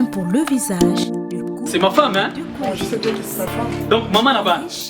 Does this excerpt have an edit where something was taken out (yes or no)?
no